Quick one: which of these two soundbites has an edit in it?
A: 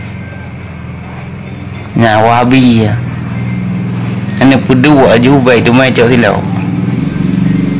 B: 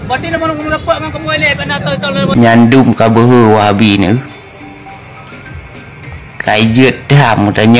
B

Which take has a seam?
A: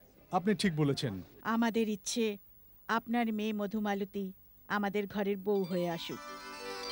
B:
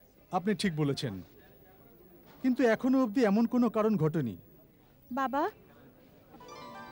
A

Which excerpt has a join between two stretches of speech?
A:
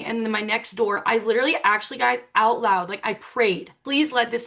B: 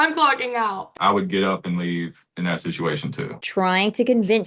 B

